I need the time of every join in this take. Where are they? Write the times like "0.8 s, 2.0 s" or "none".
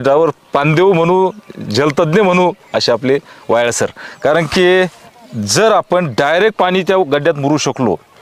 none